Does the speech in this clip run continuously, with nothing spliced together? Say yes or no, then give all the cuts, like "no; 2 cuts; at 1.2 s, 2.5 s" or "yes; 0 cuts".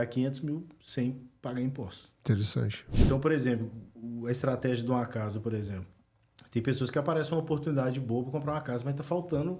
no; 1 cut; at 2.8 s